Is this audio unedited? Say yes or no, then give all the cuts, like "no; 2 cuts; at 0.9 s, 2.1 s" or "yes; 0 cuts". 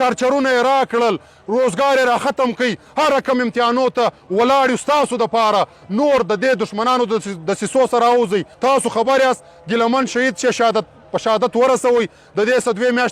no; 1 cut; at 8.5 s